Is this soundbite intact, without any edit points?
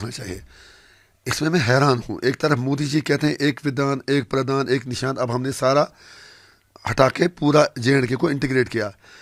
yes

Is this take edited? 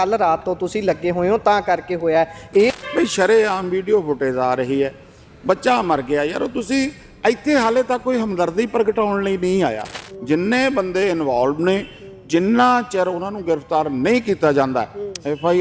yes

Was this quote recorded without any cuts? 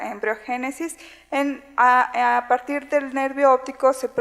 no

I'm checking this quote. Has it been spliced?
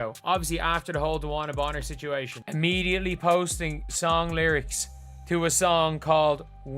yes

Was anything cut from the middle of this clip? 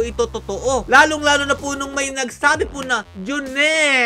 no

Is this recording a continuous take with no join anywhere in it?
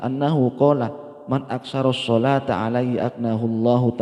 yes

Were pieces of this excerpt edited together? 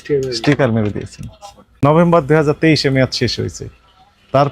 yes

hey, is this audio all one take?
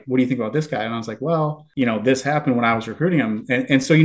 yes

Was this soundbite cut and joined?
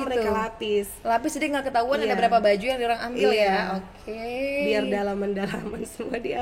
no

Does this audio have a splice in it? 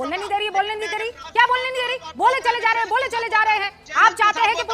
no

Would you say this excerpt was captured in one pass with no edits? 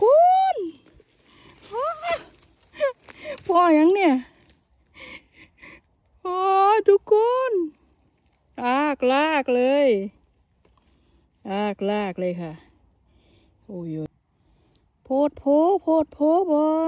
no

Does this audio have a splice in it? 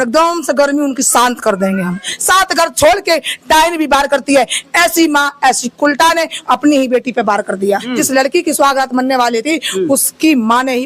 yes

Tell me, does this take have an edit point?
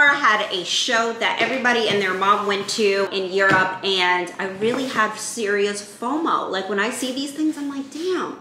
no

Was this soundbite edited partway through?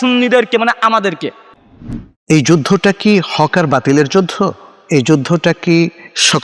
no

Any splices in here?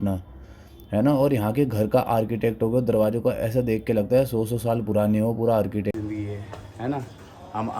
yes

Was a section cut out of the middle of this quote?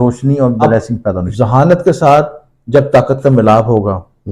yes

